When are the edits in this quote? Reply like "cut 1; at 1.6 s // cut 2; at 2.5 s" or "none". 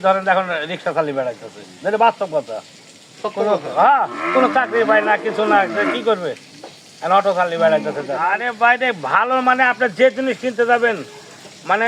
none

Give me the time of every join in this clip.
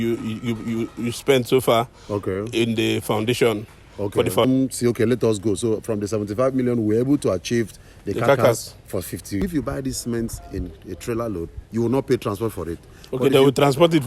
cut 1; at 4.4 s // cut 2; at 9.4 s

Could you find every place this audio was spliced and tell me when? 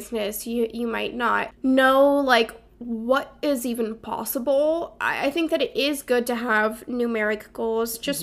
cut 1; at 1.5 s // cut 2; at 5.0 s

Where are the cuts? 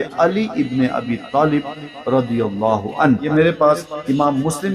cut 1; at 3.2 s

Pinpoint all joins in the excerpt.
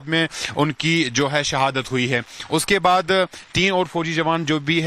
cut 1; at 3.4 s

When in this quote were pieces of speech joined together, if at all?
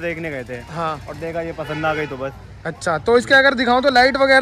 none

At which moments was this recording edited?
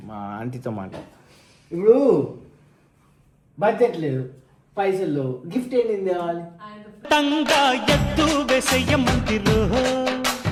none

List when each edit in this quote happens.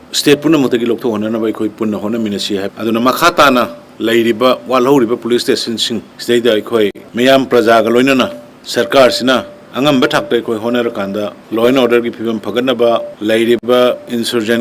cut 1; at 2.7 s

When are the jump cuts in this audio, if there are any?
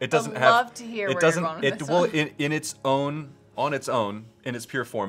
none

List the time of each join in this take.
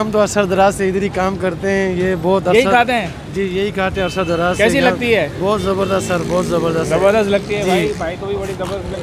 none

